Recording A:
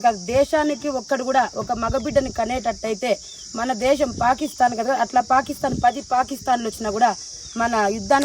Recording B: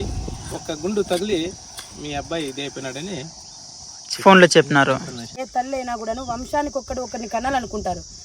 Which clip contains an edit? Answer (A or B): B